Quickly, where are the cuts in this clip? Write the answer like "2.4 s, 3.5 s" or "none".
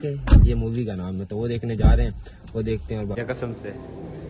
1.4 s, 3.2 s